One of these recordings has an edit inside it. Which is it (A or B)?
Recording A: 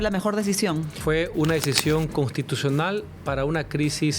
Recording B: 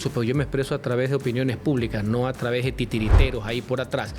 A